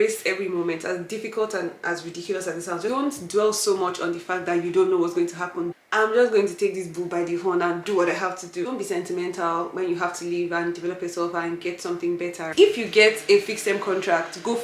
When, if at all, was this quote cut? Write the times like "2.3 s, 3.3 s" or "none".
2.9 s, 5.7 s, 8.7 s, 12.5 s

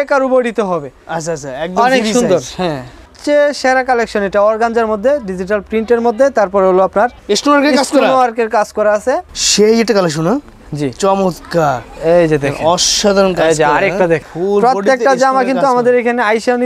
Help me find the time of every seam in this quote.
3.1 s, 9.3 s, 14.3 s

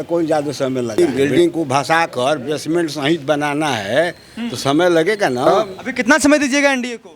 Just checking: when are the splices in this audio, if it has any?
1.0 s, 5.5 s

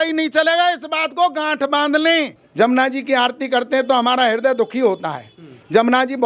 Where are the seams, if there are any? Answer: 2.4 s

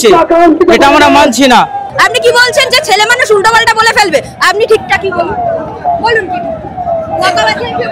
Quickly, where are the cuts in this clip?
1.8 s

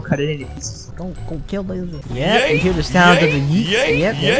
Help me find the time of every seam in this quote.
0.9 s

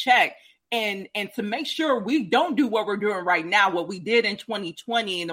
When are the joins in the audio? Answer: none

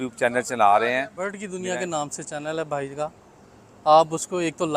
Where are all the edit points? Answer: 1.5 s

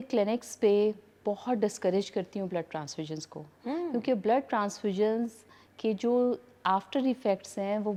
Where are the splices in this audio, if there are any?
none

